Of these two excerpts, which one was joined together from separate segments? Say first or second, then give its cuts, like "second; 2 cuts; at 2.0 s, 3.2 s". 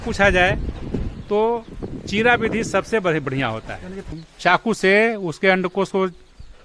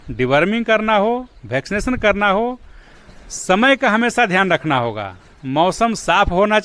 first; 1 cut; at 4.0 s